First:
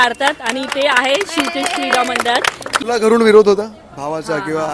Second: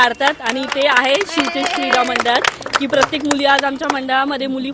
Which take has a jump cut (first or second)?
first